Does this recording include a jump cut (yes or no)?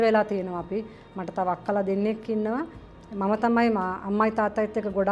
no